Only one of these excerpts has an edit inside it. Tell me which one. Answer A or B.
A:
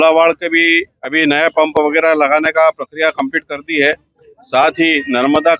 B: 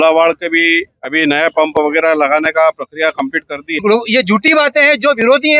B